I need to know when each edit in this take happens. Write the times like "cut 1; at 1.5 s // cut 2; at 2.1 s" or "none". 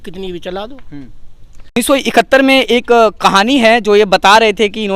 cut 1; at 1.8 s

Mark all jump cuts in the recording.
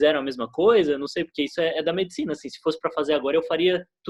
none

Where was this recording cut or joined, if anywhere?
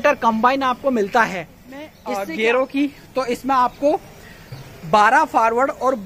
cut 1; at 2.0 s

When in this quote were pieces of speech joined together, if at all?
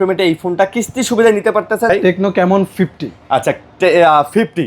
cut 1; at 1.9 s

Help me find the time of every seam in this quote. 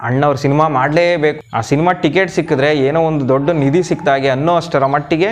cut 1; at 1.4 s

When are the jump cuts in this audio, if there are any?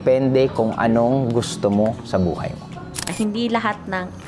cut 1; at 3.1 s

